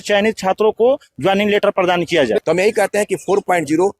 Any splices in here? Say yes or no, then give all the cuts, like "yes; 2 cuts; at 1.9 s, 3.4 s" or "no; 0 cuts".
yes; 1 cut; at 2.4 s